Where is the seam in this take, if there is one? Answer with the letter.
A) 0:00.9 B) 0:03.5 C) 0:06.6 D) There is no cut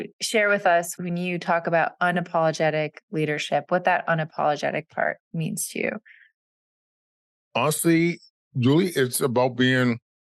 A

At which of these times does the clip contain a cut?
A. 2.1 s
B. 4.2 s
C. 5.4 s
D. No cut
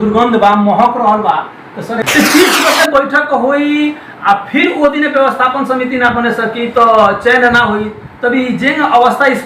A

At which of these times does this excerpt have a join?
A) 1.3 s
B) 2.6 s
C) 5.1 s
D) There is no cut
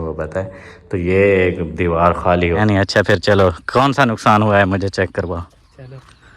B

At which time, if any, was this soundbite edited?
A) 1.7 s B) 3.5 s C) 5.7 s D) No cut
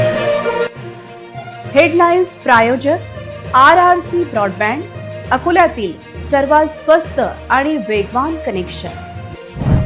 D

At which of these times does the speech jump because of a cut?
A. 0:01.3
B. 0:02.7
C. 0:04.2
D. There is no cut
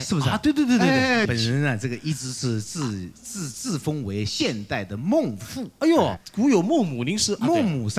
A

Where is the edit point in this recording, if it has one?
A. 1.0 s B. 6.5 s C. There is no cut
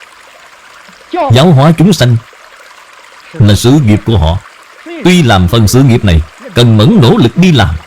A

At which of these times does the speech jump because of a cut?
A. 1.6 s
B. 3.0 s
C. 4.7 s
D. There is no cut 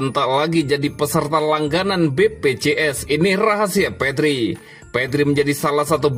D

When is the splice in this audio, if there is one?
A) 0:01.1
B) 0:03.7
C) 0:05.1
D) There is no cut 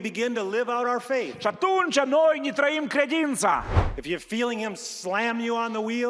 B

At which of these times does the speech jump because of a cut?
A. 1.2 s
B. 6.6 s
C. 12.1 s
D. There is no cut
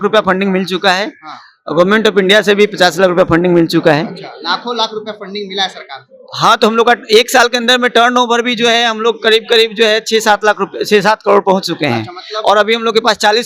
D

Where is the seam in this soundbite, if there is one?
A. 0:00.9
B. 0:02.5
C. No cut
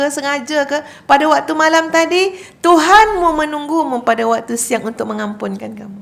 C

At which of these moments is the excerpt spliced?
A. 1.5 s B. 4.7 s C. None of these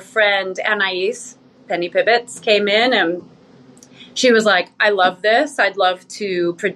C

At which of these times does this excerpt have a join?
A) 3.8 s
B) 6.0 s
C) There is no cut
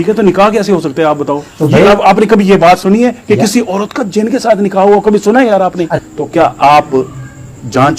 B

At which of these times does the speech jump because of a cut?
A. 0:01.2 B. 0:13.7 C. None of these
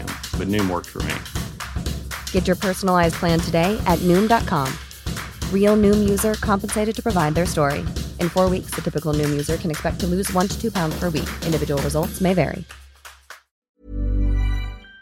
B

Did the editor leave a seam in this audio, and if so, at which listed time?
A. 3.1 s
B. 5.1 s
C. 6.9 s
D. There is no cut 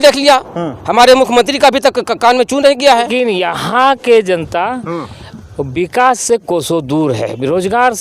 A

